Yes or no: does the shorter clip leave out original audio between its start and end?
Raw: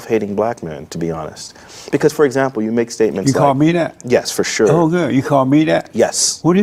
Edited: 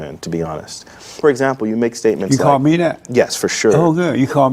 yes